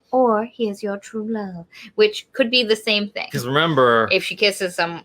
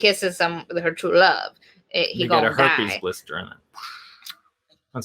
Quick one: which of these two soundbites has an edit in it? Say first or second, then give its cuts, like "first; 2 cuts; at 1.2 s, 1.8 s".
first; 1 cut; at 3.3 s